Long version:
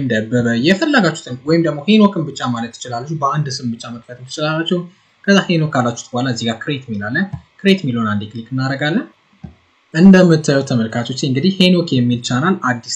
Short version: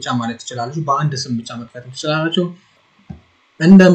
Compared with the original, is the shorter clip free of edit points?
no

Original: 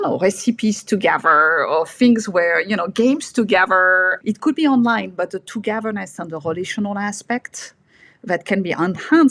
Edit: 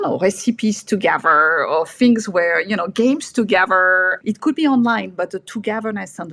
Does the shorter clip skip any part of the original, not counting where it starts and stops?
no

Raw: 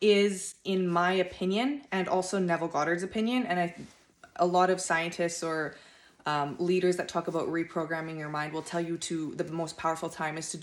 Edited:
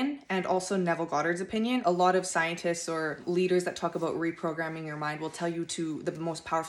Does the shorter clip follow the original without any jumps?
no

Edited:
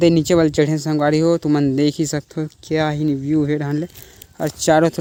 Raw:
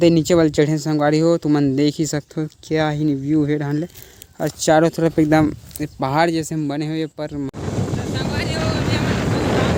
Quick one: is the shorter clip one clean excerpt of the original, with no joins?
yes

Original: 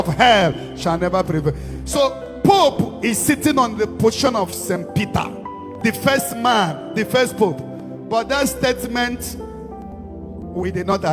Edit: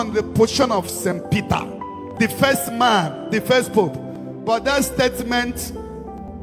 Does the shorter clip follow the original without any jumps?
yes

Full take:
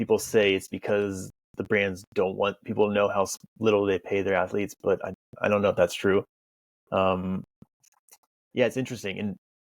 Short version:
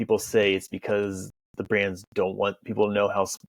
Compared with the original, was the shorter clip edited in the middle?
no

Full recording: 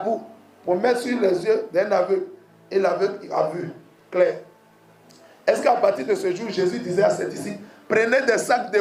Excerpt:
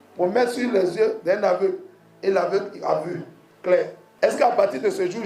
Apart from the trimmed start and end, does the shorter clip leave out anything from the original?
yes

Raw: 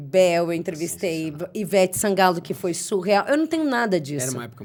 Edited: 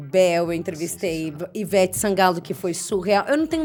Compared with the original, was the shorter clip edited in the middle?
no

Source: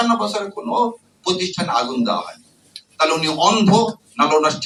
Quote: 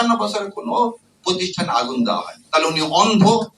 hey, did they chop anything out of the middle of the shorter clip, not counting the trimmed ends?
yes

